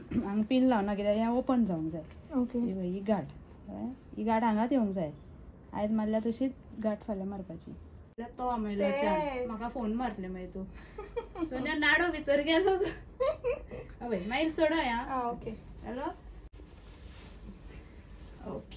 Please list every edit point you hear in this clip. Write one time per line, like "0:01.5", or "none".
0:08.2
0:16.5